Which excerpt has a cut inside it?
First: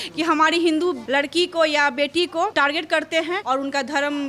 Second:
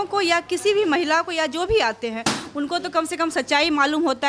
first; 3 cuts; at 1.0 s, 2.5 s, 3.4 s

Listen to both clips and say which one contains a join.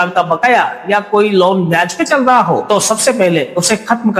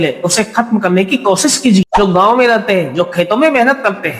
second; 1 cut; at 1.9 s

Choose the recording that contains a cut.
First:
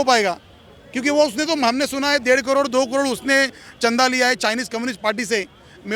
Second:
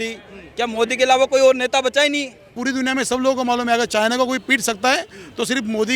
second; 1 cut; at 2.5 s

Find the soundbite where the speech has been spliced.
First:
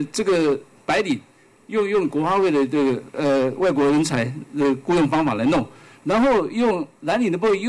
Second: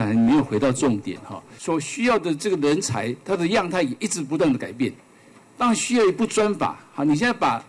second; 1 cut; at 1.5 s

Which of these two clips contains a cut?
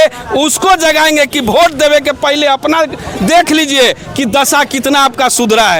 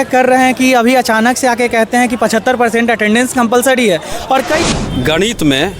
second; 1 cut; at 4.6 s

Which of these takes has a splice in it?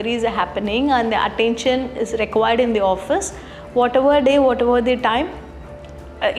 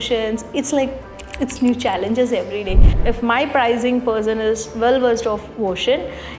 second; 1 cut; at 2.9 s

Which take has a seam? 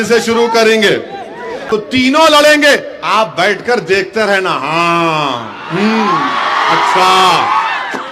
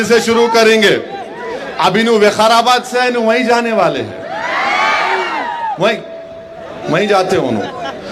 first; 1 cut; at 1.6 s

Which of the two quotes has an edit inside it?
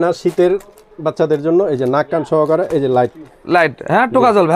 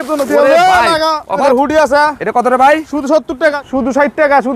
second; 2 cuts; at 1.4 s, 3.6 s

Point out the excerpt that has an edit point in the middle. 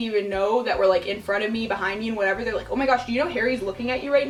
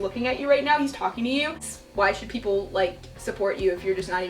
second; 1 cut; at 1.7 s

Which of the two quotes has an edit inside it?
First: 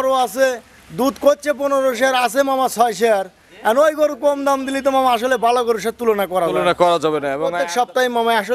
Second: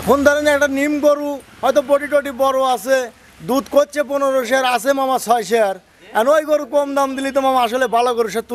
first; 1 cut; at 7.5 s

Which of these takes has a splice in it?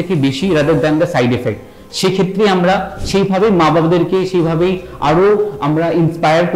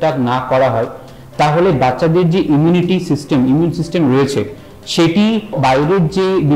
second; 1 cut; at 5.6 s

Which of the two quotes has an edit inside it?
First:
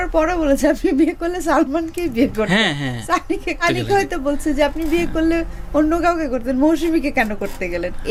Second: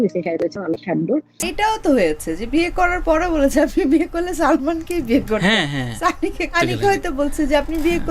second; 1 cut; at 1.5 s

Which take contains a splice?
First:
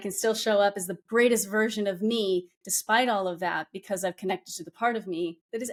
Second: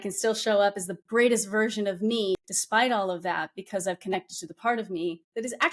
second; 1 cut; at 2.4 s

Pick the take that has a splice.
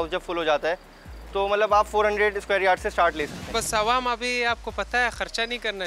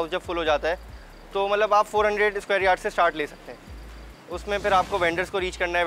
first; 1 cut; at 3.4 s

